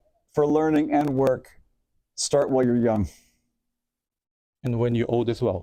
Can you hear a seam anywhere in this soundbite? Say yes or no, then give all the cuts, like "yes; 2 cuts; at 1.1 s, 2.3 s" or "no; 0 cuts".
no; 0 cuts